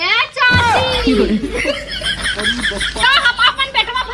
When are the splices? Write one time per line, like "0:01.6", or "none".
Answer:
0:03.0